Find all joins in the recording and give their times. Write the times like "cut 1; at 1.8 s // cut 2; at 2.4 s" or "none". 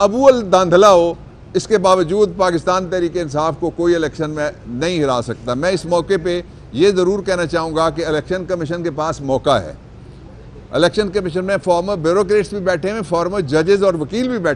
none